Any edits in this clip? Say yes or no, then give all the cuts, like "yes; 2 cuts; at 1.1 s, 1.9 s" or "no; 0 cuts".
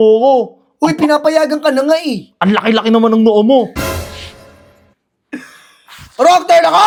no; 0 cuts